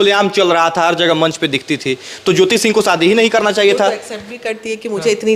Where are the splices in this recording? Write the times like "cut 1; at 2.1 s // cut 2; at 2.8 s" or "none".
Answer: none